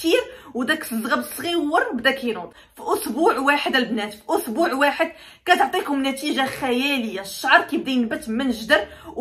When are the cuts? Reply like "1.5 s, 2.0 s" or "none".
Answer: 2.6 s

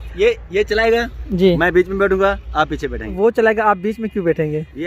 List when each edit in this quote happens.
3.1 s

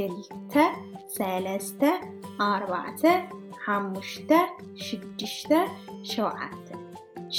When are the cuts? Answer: none

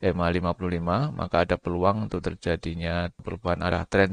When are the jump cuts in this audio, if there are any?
3.2 s

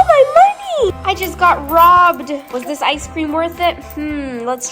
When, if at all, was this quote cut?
0.9 s, 2.4 s

